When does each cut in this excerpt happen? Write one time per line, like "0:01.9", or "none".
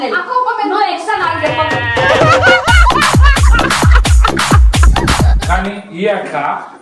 0:05.4